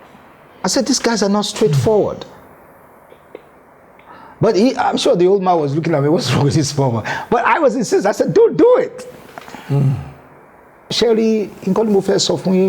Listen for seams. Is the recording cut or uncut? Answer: cut